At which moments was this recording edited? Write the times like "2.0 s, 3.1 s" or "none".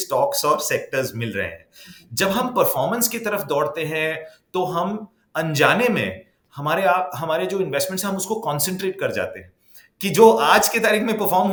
none